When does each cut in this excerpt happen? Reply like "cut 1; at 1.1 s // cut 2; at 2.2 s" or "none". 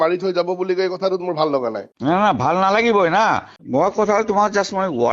cut 1; at 3.5 s

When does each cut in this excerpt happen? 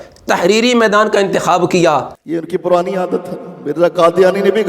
cut 1; at 2.1 s

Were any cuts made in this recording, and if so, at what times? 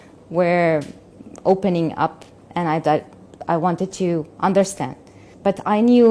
none

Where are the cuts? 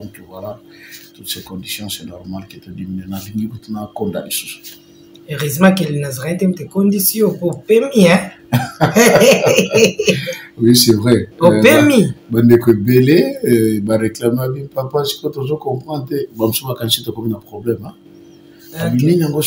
none

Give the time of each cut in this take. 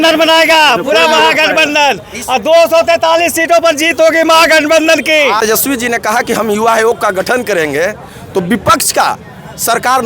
cut 1; at 5.4 s

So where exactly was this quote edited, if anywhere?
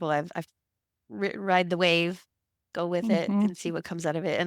none

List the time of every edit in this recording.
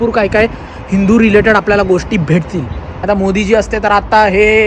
cut 1; at 2.9 s

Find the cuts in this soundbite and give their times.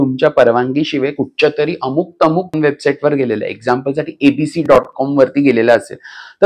cut 1; at 2.5 s

